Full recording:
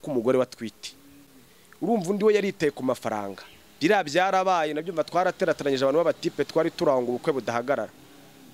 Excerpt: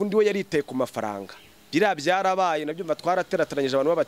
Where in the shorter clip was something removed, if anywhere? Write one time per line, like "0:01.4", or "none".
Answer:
none